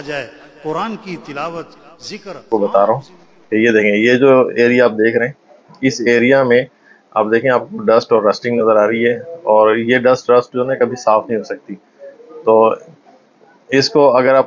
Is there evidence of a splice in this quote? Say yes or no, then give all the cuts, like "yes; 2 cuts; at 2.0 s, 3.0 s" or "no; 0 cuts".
yes; 1 cut; at 2.5 s